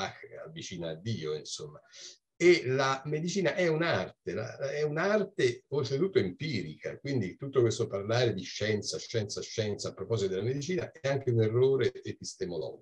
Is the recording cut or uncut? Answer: uncut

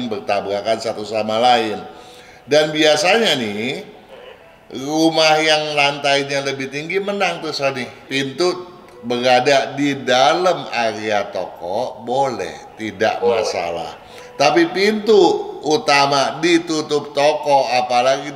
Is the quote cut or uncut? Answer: cut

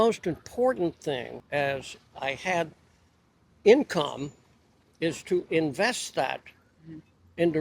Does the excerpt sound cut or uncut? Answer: cut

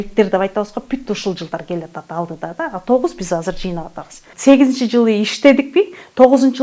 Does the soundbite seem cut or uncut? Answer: cut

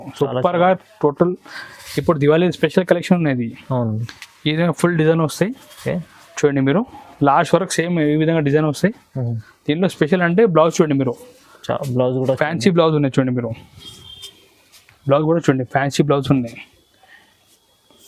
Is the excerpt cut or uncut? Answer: uncut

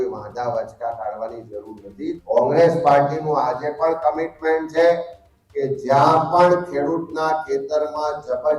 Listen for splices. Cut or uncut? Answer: cut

